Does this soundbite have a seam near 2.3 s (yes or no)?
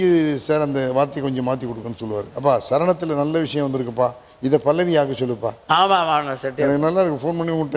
yes